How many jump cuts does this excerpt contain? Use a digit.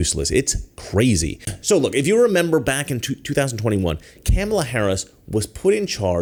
0